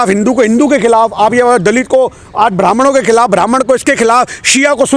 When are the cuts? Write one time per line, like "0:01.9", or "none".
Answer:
none